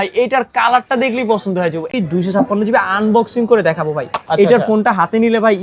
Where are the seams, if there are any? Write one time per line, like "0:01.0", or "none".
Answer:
0:01.9